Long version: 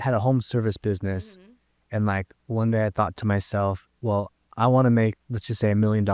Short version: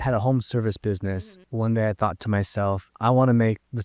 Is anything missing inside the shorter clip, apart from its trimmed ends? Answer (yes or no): yes